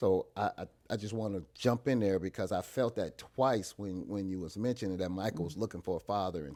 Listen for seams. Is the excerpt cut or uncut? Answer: uncut